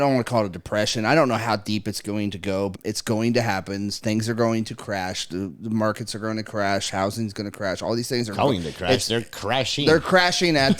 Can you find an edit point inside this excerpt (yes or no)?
yes